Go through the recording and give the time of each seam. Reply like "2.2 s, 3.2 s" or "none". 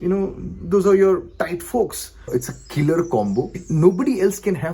2.3 s, 3.6 s